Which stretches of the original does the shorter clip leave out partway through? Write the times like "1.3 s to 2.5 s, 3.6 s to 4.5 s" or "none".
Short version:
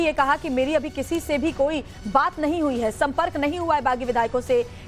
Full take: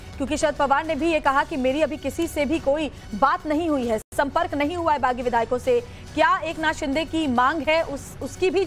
4.0 s to 4.1 s